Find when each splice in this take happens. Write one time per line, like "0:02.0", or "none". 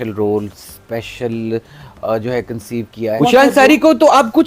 0:03.2